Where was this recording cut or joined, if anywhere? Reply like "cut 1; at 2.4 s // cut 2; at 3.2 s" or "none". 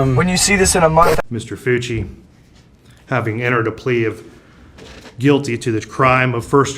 cut 1; at 1.3 s